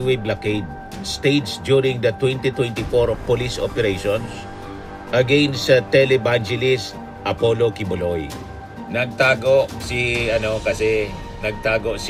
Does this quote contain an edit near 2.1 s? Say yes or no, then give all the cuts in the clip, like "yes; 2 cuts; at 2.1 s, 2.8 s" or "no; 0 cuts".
no; 0 cuts